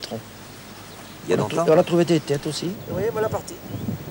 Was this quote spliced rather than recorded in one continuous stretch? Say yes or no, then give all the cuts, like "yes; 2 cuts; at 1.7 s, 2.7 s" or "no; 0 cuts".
yes; 1 cut; at 2.8 s